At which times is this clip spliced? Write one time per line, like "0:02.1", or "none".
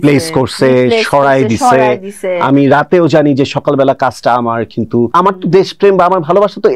0:05.1